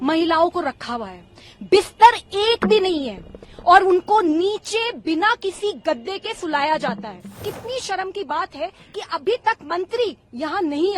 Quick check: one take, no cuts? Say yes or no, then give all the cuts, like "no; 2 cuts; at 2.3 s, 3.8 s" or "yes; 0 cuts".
no; 1 cut; at 7.5 s